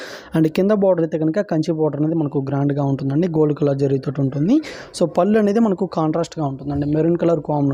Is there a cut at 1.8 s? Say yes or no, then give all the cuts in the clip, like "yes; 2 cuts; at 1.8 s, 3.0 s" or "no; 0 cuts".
no; 0 cuts